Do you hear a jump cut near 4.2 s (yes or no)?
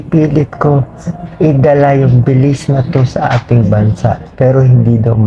no